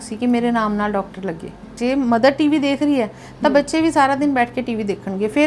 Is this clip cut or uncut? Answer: cut